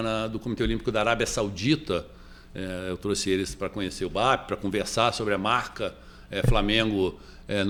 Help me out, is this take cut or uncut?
uncut